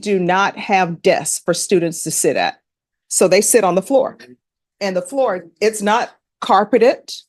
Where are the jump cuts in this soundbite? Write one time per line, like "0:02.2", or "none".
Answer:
none